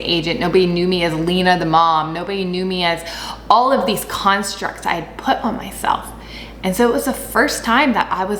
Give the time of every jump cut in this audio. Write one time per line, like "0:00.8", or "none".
none